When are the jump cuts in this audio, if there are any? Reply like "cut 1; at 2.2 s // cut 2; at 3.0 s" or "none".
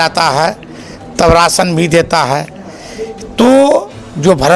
none